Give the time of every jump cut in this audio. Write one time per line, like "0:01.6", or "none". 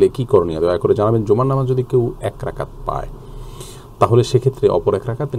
none